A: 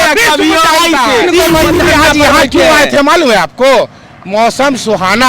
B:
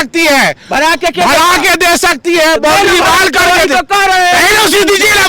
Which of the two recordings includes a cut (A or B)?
A